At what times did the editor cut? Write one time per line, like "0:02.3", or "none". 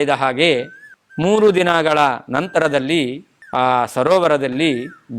none